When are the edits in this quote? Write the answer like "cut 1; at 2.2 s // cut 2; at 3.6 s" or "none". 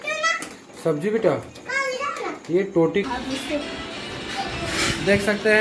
cut 1; at 3.0 s